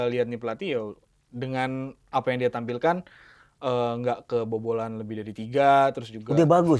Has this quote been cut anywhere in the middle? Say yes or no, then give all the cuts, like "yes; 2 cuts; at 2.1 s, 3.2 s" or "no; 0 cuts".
no; 0 cuts